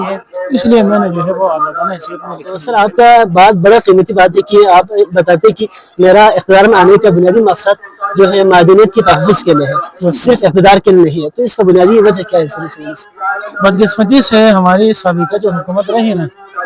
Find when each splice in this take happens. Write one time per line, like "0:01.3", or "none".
none